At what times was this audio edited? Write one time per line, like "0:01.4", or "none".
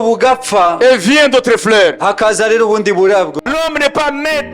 0:03.4